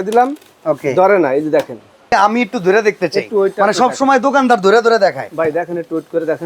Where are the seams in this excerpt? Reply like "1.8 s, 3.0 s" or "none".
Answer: 2.1 s